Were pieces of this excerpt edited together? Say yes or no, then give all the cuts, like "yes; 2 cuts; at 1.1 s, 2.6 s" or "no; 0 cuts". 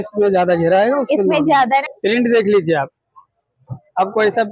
yes; 1 cut; at 1.9 s